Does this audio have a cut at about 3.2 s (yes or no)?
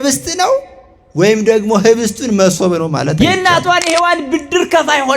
yes